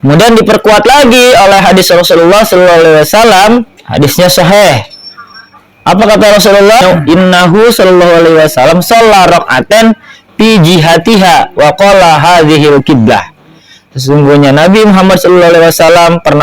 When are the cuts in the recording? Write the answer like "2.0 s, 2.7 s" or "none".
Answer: 3.8 s, 6.8 s